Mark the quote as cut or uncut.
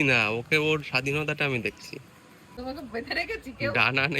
cut